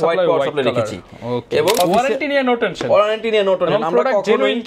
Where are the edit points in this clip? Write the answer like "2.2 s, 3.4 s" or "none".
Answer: 1.8 s